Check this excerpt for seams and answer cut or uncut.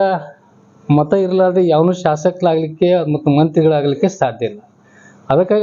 uncut